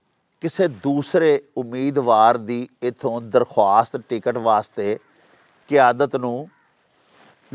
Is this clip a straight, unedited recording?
yes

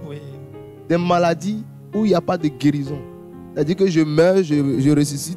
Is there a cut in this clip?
no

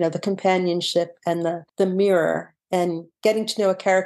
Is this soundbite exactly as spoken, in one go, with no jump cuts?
no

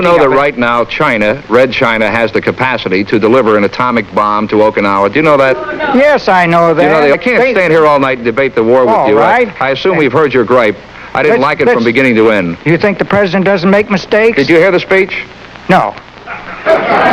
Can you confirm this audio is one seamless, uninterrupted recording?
no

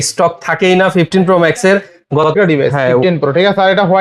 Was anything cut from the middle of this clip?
yes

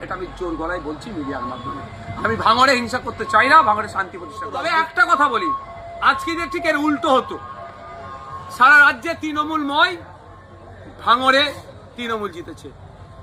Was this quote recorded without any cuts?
no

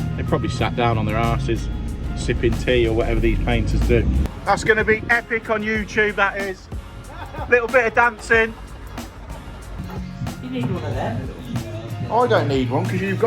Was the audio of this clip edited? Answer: yes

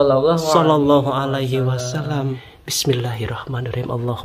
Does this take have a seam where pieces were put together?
yes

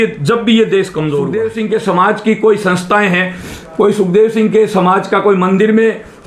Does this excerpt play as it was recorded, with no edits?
no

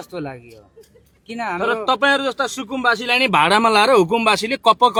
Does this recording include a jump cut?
no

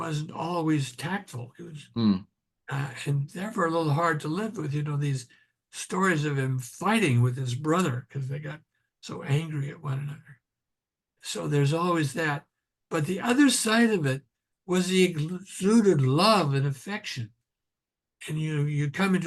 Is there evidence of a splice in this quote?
no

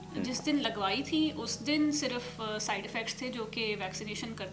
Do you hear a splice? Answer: no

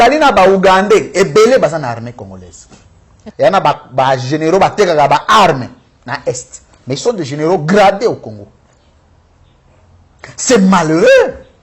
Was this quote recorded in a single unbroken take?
no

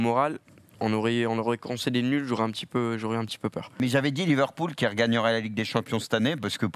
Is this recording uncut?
no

